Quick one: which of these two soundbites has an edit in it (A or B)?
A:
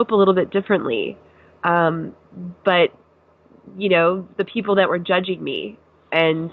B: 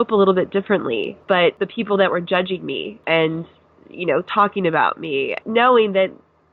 B